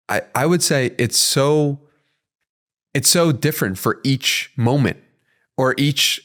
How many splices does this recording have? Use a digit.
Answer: 0